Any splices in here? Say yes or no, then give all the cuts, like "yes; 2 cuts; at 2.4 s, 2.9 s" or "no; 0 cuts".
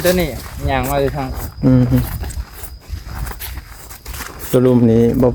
no; 0 cuts